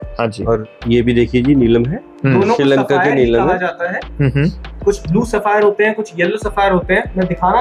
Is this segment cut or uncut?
uncut